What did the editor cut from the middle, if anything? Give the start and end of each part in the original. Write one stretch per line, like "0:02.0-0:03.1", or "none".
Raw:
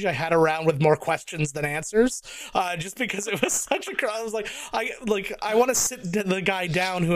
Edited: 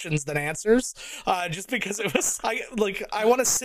0:03.6-0:04.6